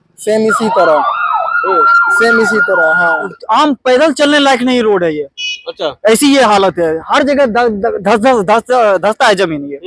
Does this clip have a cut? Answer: yes; 1 cut; at 3.4 s

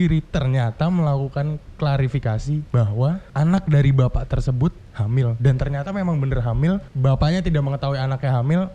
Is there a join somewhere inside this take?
yes; 2 cuts; at 3.3 s, 6.9 s

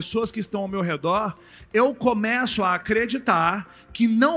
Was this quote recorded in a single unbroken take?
yes; 0 cuts

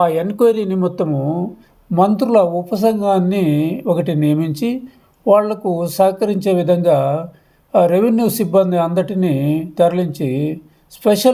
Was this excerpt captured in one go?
yes; 0 cuts

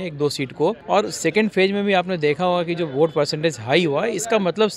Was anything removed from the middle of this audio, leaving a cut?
no; 0 cuts

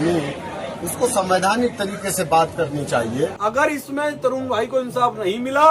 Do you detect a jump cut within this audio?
yes; 1 cut; at 3.4 s

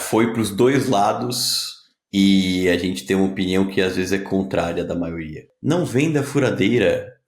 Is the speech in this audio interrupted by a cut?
yes; 1 cut; at 5.5 s

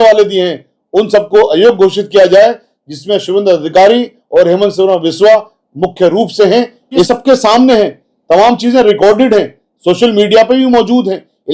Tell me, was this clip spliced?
yes; 1 cut; at 7.1 s

